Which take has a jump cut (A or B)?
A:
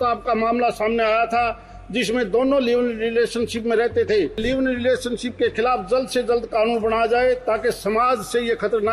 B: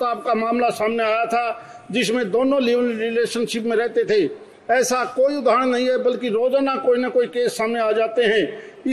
A